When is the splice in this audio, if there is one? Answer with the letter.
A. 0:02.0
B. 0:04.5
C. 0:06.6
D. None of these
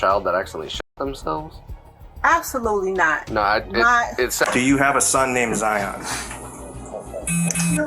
B